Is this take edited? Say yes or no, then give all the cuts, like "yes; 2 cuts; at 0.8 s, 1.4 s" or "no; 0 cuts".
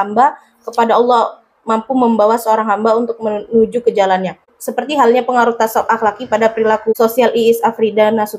yes; 1 cut; at 6.9 s